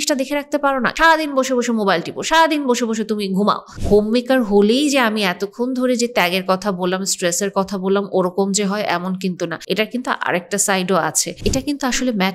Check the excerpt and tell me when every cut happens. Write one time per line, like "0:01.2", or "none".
0:00.9
0:03.7
0:09.6
0:11.3